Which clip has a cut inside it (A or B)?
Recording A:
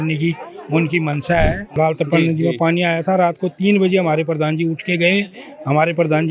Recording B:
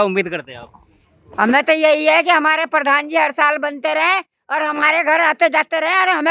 A